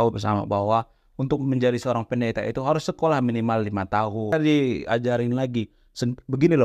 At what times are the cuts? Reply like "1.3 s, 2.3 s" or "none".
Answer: 4.3 s